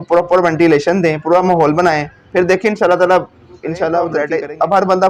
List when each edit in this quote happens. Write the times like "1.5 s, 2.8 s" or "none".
4.2 s